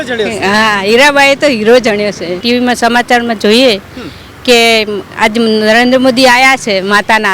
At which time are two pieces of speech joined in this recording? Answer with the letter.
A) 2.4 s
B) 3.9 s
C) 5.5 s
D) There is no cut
A